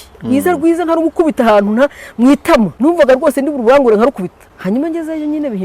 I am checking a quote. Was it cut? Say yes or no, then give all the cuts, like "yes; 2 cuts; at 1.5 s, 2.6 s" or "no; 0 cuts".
yes; 2 cuts; at 2.7 s, 4.4 s